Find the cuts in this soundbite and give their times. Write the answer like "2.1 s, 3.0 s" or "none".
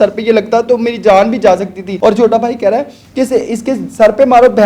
1.8 s